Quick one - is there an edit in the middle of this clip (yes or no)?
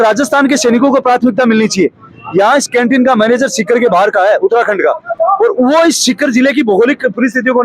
no